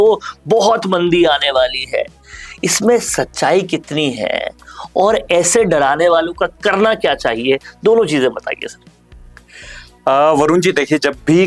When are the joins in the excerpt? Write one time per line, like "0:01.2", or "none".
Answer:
none